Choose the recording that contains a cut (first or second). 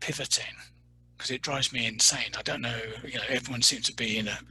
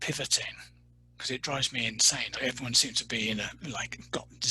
second